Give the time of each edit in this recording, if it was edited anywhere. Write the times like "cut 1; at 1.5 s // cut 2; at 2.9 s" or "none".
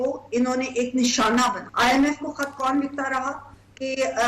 cut 1; at 1.6 s